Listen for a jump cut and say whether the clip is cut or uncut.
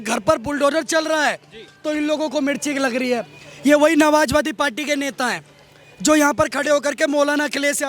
uncut